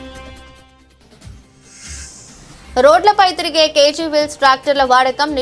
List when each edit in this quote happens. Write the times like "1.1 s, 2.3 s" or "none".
1.7 s